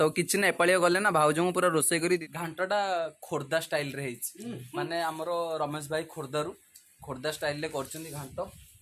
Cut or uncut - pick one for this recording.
cut